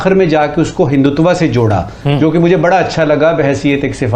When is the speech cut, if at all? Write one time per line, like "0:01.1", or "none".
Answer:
none